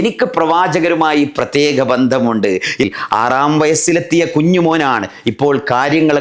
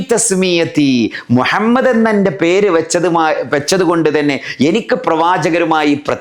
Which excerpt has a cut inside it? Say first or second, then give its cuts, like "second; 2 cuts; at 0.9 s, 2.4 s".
first; 1 cut; at 2.8 s